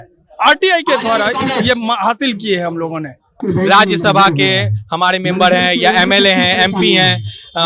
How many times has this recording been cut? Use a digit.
1